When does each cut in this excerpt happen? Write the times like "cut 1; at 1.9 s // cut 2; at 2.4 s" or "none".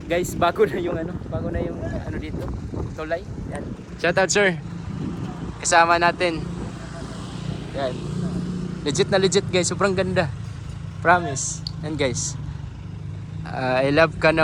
none